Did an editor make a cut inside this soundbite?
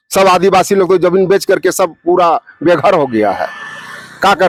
no; 0 cuts

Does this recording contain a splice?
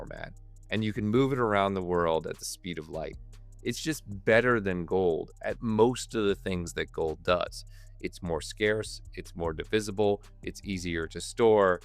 no; 0 cuts

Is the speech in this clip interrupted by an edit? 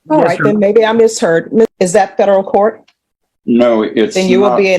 yes; 1 cut; at 1.7 s

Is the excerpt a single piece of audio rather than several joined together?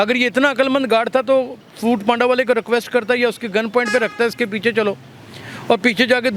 yes; 0 cuts

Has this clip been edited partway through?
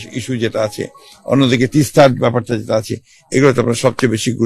no; 0 cuts

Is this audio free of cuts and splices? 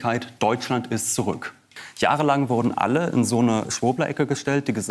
no; 1 cut; at 1.7 s

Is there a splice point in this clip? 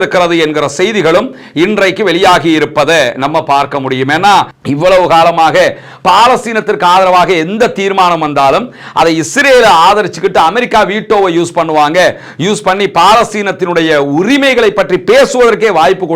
yes; 1 cut; at 4.5 s

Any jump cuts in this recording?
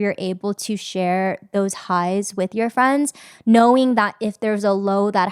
no; 0 cuts

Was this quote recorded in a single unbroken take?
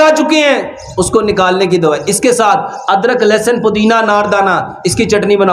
yes; 0 cuts

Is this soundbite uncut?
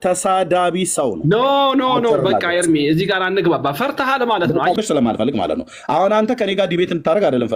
no; 1 cut; at 4.8 s

